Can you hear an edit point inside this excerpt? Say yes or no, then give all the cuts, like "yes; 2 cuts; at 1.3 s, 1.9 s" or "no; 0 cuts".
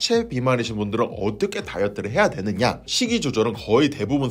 no; 0 cuts